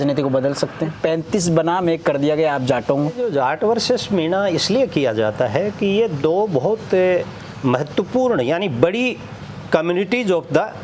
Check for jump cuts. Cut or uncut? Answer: cut